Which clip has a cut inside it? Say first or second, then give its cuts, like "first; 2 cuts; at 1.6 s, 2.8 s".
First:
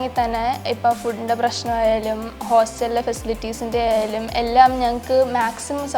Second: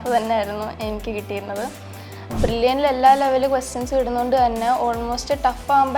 second; 1 cut; at 2.2 s